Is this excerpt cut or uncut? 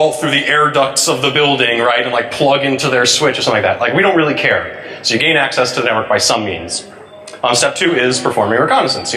uncut